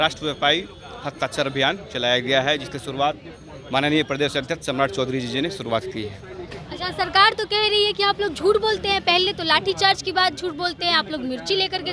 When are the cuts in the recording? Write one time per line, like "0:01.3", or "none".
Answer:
none

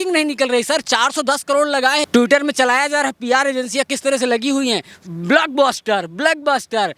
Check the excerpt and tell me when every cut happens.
0:02.1

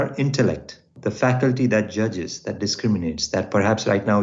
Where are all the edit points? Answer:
0:00.9

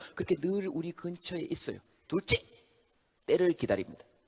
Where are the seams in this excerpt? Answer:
0:01.8

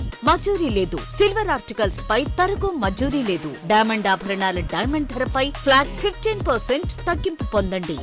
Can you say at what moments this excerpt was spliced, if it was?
none

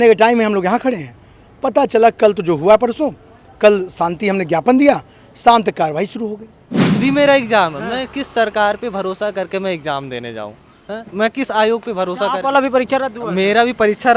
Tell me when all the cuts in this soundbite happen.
0:07.0

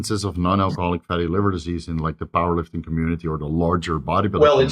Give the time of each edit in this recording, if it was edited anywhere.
none

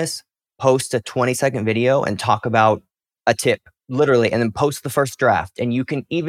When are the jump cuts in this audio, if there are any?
0:03.3

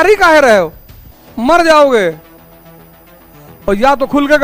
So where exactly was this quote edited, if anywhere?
none

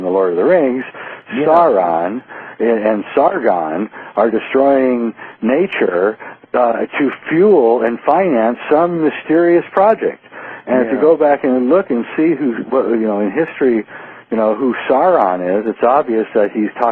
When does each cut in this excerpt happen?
0:04.2

